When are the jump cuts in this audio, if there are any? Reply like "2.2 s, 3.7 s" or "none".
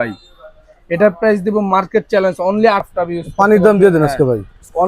2.8 s